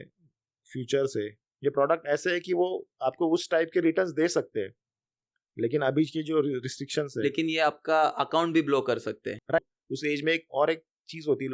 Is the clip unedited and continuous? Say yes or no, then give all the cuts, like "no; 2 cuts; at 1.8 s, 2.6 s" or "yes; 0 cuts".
no; 1 cut; at 9.6 s